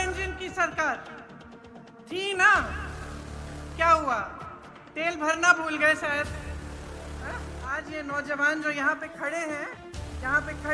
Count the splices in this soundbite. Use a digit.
2